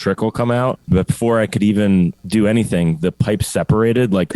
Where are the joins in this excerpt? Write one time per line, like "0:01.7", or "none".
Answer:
0:00.8
0:02.2